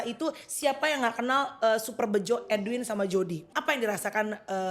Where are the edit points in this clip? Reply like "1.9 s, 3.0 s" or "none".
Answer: 3.5 s